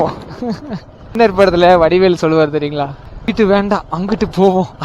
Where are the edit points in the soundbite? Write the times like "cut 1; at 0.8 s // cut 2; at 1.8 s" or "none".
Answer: cut 1; at 1.1 s // cut 2; at 3.3 s